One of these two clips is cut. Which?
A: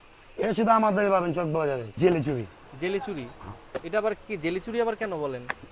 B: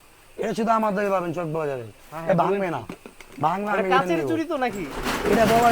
A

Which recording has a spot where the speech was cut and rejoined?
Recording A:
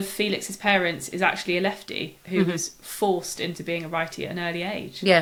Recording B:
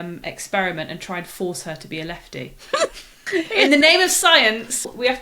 B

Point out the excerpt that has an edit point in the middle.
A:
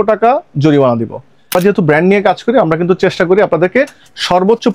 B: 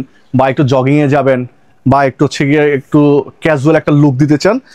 A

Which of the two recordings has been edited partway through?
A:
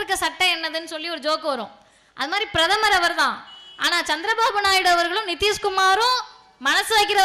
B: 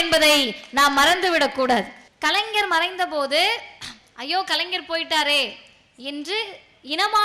B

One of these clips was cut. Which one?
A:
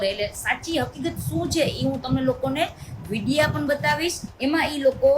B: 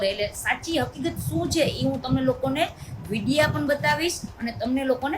A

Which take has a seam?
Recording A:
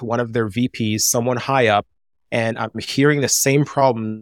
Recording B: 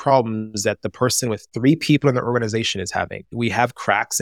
B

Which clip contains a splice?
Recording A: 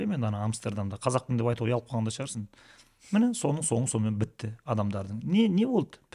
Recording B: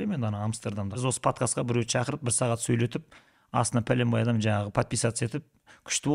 B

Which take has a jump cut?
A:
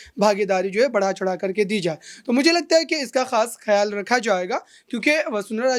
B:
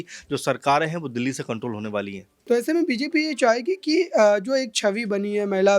B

